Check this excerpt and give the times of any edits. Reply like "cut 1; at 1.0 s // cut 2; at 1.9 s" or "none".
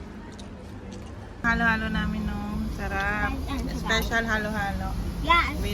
cut 1; at 1.4 s